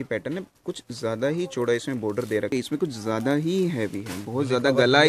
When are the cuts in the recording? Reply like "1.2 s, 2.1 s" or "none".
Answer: 2.5 s